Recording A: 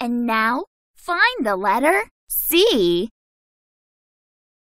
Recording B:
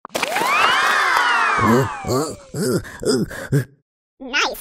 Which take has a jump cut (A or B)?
A